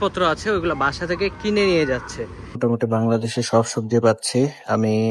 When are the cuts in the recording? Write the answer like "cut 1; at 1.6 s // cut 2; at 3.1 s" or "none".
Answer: cut 1; at 2.6 s